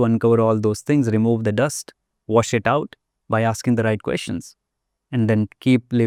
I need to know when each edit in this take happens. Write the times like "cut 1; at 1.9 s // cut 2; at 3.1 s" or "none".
none

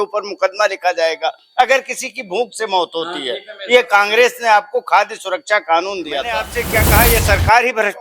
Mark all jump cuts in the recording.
cut 1; at 6.6 s

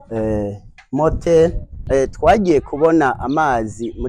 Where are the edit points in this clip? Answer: cut 1; at 1.7 s

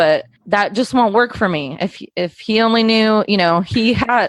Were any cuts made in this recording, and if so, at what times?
none

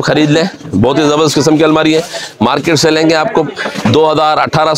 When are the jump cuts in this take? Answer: none

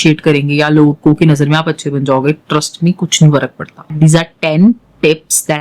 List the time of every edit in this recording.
cut 1; at 3.8 s

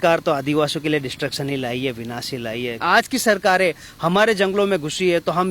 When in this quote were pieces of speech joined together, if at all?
cut 1; at 2.8 s

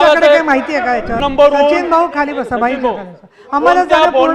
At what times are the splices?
cut 1; at 1.2 s

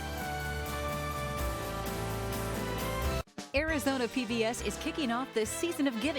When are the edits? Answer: cut 1; at 3.3 s

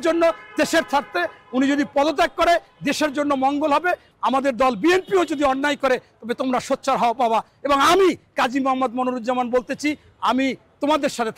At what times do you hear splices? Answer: cut 1; at 4.1 s

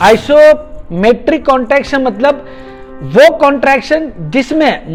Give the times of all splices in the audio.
none

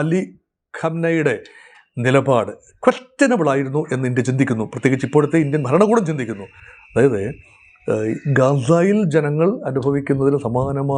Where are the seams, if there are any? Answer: none

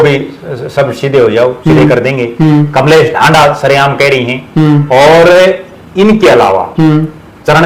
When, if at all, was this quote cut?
none

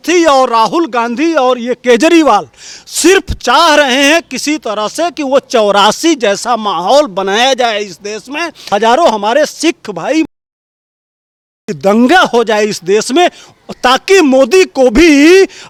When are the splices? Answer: none

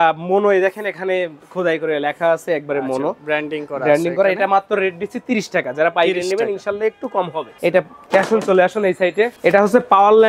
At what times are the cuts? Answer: none

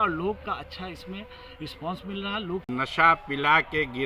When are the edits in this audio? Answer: cut 1; at 2.7 s

